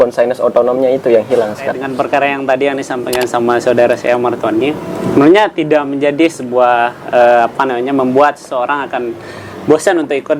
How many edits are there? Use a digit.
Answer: 1